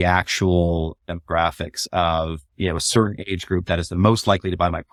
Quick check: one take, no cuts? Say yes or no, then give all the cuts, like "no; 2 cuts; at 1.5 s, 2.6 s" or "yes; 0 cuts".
yes; 0 cuts